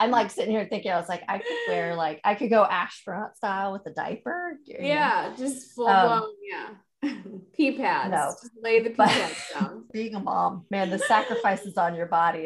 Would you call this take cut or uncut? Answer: cut